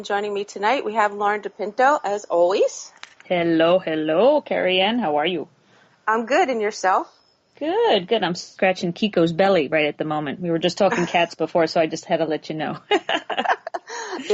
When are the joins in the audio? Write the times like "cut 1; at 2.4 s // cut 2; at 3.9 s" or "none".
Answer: none